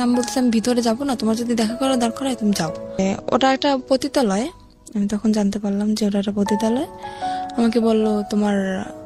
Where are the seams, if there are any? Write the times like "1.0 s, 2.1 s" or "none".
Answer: 3.0 s

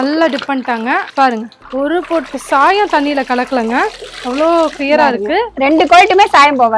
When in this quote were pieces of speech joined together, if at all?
none

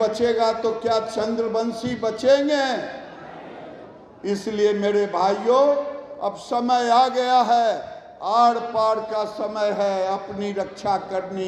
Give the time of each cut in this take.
none

